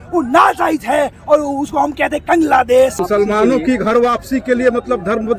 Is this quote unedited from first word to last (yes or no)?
no